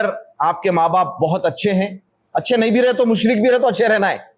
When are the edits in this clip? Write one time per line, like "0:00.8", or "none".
none